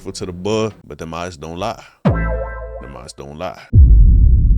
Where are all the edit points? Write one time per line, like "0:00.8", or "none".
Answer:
0:03.6